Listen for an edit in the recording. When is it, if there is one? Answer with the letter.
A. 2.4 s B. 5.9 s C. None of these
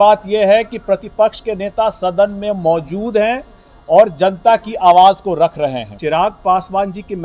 B